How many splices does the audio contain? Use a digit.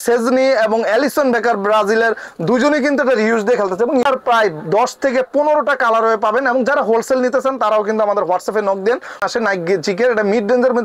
2